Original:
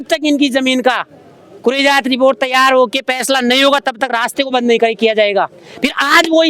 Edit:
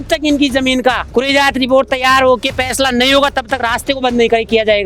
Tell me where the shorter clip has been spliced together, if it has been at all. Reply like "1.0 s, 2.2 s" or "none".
1.0 s